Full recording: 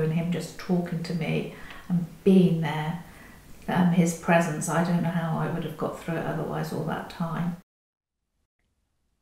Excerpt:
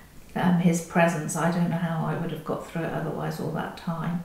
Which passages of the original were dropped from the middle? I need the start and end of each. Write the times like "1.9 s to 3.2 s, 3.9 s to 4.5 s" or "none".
none